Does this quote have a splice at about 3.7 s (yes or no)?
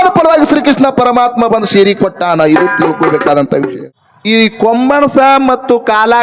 yes